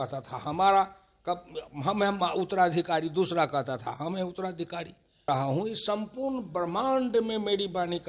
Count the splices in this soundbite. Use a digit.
1